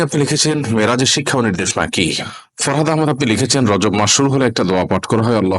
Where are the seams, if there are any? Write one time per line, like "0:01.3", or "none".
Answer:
0:02.2